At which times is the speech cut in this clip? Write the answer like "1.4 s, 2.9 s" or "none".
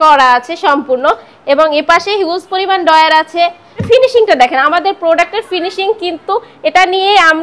3.8 s